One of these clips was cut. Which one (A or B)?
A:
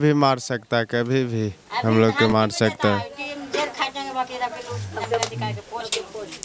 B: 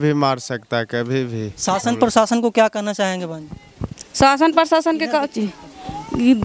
B